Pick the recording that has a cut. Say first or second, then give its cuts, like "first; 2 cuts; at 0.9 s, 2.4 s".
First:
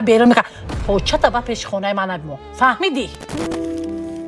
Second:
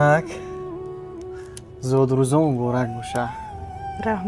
first; 1 cut; at 3.4 s